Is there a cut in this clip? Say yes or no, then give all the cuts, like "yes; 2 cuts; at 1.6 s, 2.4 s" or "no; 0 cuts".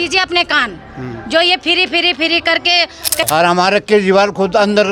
yes; 1 cut; at 3.2 s